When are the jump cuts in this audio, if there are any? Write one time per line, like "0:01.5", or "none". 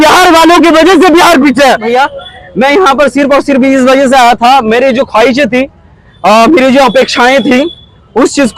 0:01.9